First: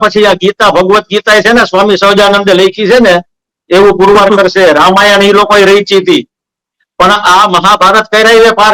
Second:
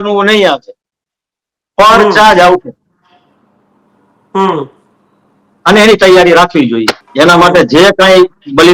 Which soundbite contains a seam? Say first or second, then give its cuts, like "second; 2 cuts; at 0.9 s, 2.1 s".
second; 1 cut; at 7.0 s